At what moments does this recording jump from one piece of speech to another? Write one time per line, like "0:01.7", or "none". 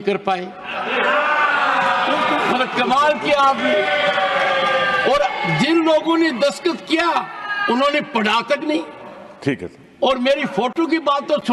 none